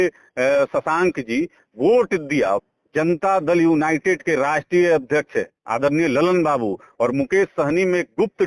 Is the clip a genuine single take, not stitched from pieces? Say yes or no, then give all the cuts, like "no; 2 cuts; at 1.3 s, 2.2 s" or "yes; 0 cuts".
no; 1 cut; at 2.7 s